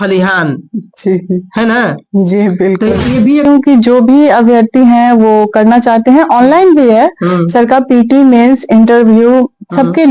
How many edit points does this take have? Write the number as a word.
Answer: one